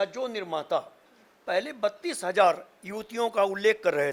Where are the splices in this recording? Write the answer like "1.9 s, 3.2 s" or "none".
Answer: none